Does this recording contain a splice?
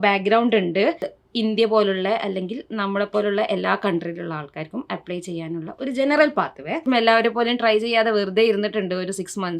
yes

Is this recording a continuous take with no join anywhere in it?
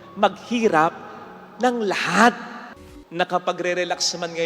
no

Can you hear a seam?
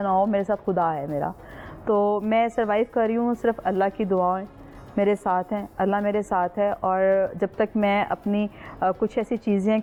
no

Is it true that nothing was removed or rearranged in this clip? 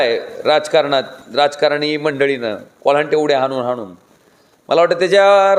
yes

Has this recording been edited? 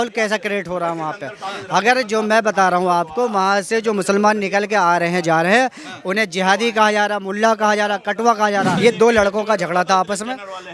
yes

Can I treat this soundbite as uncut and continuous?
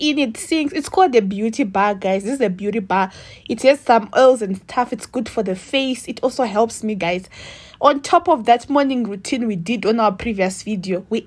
yes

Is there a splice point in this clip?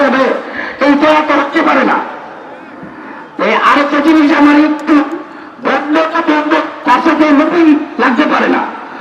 no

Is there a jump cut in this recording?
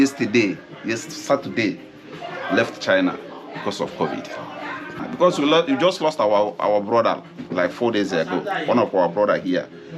yes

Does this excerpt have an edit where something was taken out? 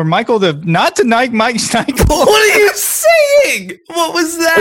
no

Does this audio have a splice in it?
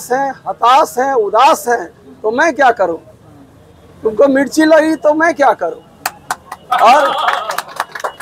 no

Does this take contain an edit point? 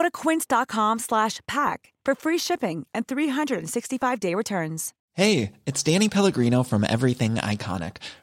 yes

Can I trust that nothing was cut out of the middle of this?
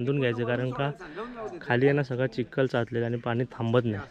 yes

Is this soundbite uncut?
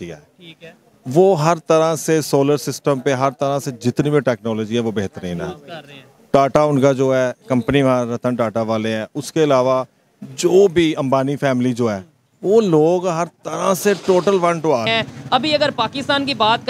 no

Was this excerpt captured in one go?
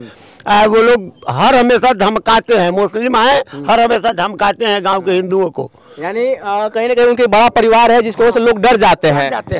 yes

